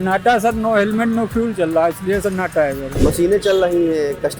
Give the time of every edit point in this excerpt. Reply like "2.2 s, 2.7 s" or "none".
2.9 s